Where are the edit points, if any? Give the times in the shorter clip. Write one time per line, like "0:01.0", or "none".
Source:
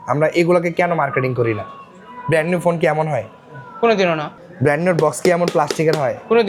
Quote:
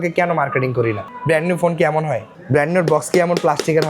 0:01.1
0:02.3